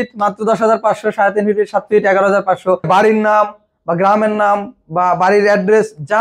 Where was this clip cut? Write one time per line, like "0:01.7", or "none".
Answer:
0:02.9